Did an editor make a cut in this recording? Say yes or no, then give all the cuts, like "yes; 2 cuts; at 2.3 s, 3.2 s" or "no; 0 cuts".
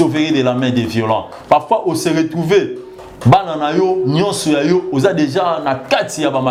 no; 0 cuts